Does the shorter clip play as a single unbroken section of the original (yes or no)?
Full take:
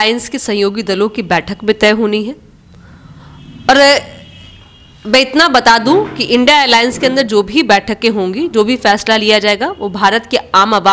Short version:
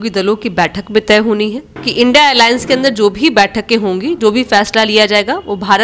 no